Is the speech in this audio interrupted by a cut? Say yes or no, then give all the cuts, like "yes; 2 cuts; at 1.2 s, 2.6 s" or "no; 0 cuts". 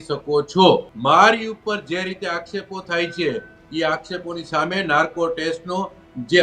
yes; 1 cut; at 0.9 s